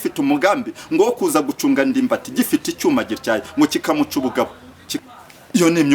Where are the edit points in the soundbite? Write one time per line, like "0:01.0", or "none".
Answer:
0:04.9